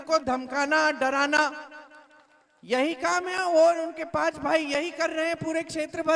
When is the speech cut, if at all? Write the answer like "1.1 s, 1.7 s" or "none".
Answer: none

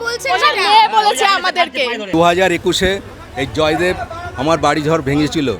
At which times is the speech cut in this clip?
2.0 s

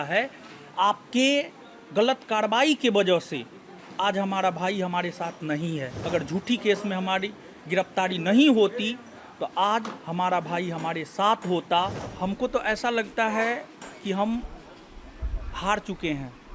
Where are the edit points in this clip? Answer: 6.0 s, 12.0 s

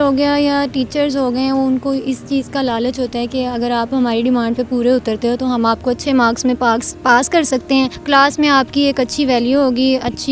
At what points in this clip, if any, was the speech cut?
8.0 s

